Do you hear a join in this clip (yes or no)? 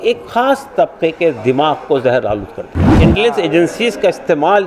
yes